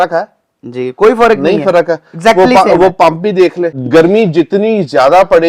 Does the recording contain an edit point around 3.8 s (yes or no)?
yes